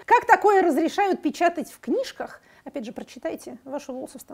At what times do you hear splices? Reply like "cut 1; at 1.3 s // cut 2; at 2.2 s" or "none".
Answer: none